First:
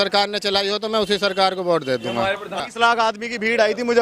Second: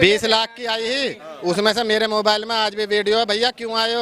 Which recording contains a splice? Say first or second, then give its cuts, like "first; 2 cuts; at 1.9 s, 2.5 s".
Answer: first; 1 cut; at 2.6 s